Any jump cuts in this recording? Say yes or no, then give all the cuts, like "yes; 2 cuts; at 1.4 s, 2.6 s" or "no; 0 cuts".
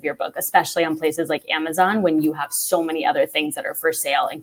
no; 0 cuts